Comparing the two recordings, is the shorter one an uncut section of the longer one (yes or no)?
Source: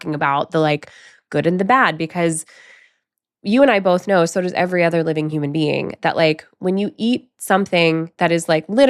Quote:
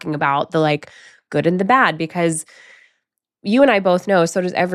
yes